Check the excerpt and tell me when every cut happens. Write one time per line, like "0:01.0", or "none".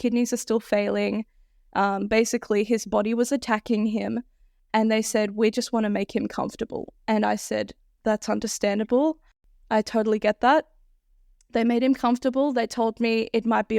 none